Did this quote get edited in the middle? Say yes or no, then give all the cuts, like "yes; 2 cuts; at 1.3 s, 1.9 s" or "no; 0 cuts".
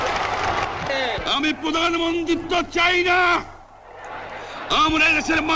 yes; 1 cut; at 2.2 s